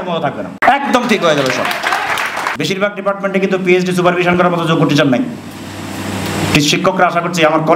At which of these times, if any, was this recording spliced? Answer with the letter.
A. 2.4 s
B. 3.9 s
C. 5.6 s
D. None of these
A